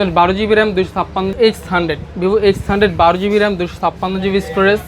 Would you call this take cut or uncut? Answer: cut